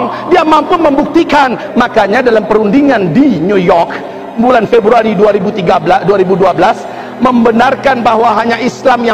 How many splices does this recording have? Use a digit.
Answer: 1